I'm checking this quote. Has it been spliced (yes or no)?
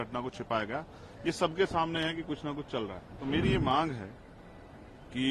yes